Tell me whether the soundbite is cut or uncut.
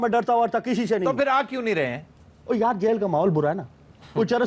uncut